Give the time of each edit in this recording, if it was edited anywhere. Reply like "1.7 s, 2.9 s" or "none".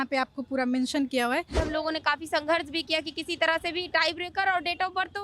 1.6 s